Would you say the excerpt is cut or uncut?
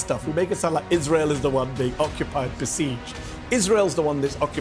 uncut